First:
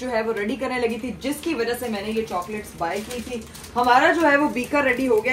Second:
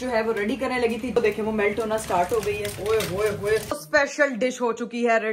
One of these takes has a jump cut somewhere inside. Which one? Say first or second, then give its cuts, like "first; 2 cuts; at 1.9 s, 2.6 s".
second; 3 cuts; at 1.2 s, 2.7 s, 3.8 s